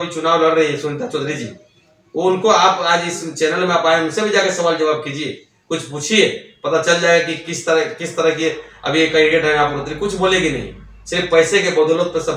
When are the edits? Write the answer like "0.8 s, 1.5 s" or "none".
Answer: none